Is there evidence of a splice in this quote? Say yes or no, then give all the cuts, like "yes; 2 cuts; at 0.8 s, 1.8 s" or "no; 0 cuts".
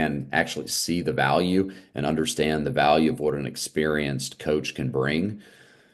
no; 0 cuts